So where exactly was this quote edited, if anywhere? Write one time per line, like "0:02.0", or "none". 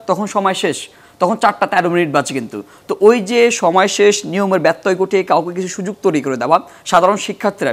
none